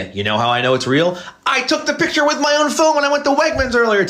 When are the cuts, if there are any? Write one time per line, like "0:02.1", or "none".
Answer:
none

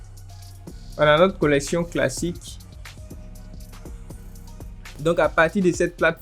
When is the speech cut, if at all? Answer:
0:04.9

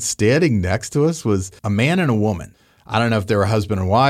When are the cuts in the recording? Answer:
0:01.5
0:02.5

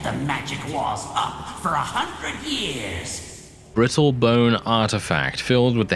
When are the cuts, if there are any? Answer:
0:03.6

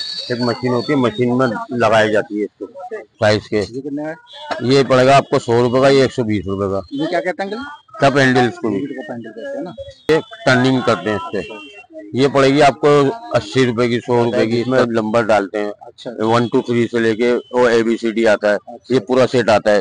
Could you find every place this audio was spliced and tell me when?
0:03.1
0:10.1
0:14.7

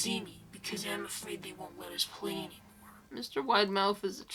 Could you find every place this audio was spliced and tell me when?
none

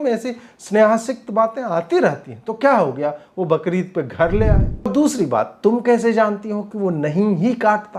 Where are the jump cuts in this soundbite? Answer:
0:04.9

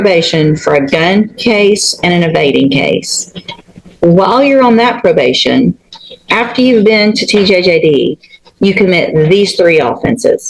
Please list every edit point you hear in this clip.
none

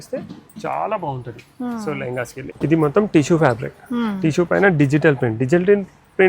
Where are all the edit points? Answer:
0:02.4

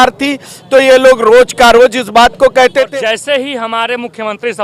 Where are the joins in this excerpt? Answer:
0:02.9

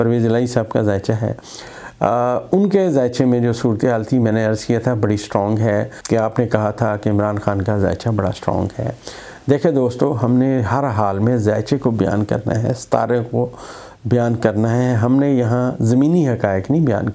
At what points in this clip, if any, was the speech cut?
0:06.0

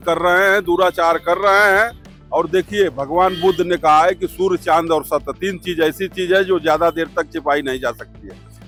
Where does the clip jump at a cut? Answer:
none

